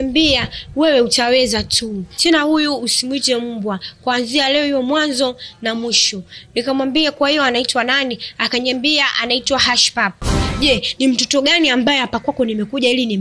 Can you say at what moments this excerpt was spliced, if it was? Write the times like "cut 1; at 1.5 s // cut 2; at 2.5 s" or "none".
cut 1; at 2.1 s // cut 2; at 10.4 s